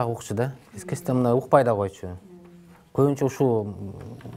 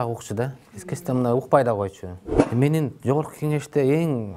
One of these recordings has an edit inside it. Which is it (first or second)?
second